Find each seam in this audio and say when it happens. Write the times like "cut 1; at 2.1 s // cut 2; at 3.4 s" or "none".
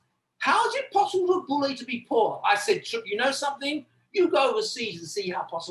none